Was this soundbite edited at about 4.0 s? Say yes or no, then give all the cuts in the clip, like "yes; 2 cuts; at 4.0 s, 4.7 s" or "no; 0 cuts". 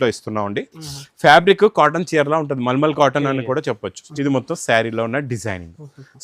yes; 1 cut; at 4.0 s